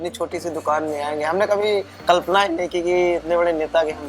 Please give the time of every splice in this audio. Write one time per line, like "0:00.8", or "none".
none